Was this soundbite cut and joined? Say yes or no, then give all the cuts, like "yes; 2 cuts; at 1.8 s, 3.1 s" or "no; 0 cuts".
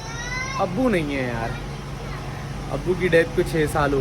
no; 0 cuts